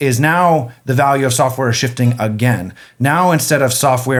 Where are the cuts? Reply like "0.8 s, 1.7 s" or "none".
none